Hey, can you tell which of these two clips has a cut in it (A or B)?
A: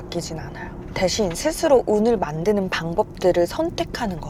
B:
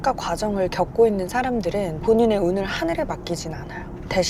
B